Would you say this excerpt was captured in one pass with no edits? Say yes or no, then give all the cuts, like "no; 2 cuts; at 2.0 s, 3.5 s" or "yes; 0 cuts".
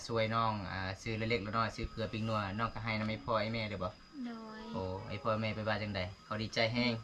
yes; 0 cuts